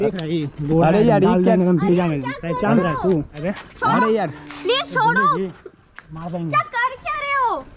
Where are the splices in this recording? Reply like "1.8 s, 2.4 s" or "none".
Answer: 3.4 s